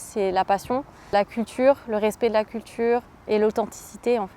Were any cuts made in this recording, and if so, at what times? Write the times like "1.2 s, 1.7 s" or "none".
1.1 s, 3.1 s